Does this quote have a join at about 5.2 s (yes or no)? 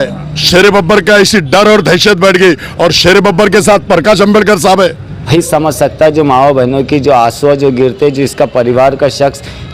yes